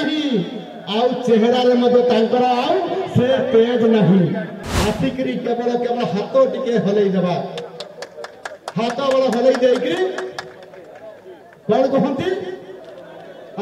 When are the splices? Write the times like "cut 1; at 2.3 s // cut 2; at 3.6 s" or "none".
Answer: cut 1; at 4.5 s

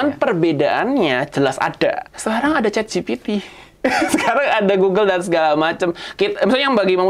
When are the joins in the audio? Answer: cut 1; at 2.1 s

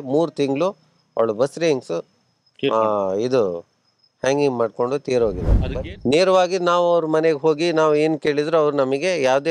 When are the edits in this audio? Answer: cut 1; at 5.5 s

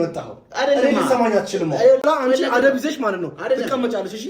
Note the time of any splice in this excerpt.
cut 1; at 2.0 s

